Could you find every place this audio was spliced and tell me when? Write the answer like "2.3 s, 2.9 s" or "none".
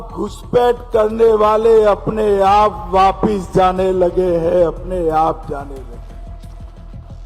6.0 s